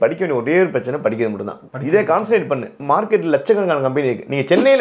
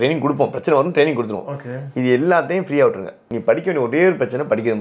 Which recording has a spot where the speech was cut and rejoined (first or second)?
first